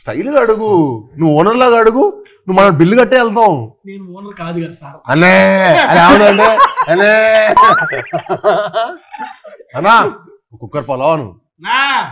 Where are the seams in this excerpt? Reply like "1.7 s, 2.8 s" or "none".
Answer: none